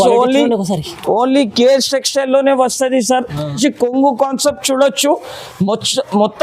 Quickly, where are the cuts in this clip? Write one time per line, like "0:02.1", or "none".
0:03.6

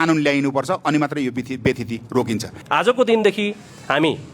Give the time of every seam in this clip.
0:02.6

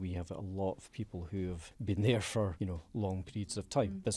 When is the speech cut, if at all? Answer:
0:01.7

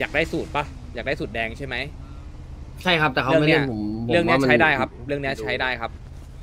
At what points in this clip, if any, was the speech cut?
none

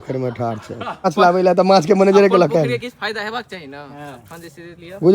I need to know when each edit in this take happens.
0:01.0

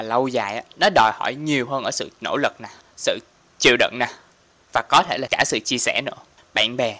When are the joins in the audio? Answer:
0:05.3

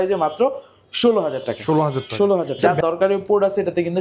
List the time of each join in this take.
0:02.6

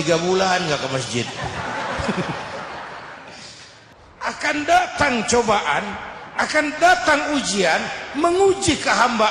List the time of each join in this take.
0:03.7

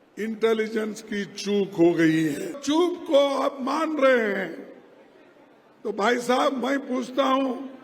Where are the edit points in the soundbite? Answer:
0:02.6

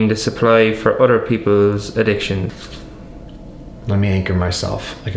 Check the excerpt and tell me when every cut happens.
0:02.6

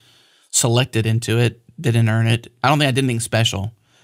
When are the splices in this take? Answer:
0:02.5

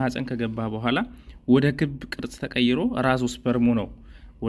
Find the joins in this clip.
none

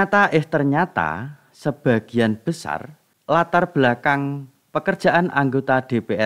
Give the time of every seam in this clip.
none

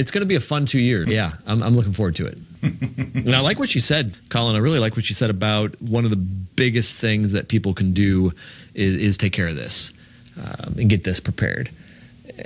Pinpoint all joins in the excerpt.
0:01.0
0:02.4
0:04.2

